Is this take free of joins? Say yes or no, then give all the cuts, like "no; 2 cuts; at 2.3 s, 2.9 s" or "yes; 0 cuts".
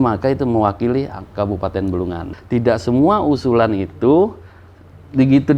no; 1 cut; at 2.3 s